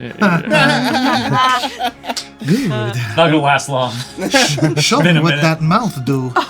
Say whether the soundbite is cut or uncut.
uncut